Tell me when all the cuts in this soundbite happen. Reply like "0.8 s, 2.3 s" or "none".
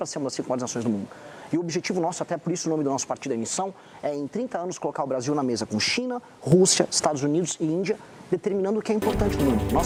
none